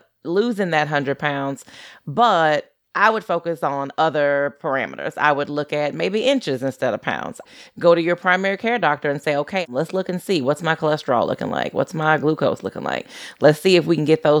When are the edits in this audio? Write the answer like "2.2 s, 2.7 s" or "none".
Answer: 7.4 s, 9.6 s